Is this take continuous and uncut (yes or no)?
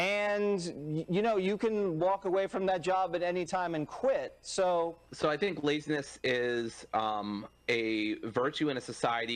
no